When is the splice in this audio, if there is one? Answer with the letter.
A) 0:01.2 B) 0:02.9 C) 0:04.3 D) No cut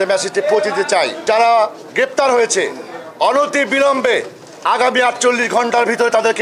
A